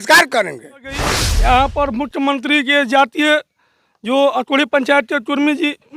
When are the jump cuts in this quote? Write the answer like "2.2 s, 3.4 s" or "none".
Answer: 1.0 s